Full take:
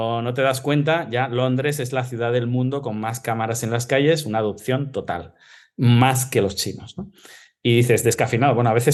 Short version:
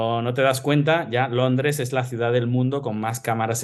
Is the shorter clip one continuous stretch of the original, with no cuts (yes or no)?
yes